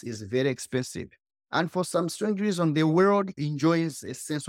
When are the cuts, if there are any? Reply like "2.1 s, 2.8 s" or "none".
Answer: none